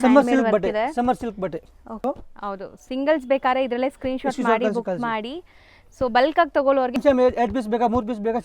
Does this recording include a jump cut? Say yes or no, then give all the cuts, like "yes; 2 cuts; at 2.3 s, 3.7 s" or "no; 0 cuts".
yes; 2 cuts; at 2.0 s, 7.0 s